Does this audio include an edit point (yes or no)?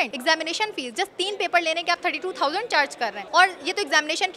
no